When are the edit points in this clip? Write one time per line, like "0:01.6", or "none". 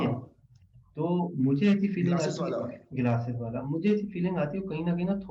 none